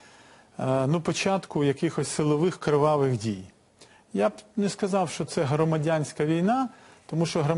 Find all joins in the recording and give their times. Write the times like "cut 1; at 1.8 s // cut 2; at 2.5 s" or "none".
cut 1; at 2.4 s